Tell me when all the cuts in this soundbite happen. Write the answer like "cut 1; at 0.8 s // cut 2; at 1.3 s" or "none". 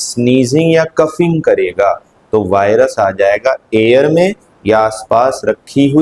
none